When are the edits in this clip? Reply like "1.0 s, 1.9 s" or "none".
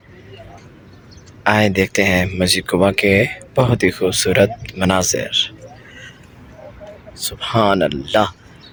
none